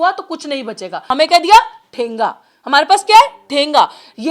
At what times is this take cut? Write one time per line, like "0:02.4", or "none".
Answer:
0:01.0

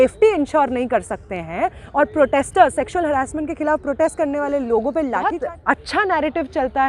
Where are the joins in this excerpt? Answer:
0:05.4

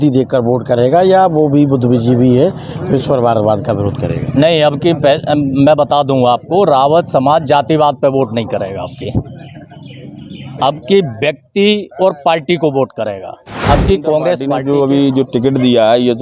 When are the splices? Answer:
0:14.5

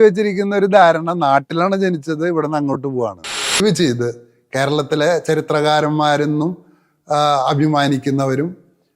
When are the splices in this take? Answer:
0:03.6

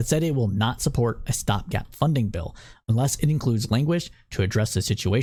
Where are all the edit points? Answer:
none

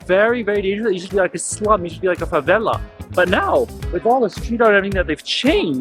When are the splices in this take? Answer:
none

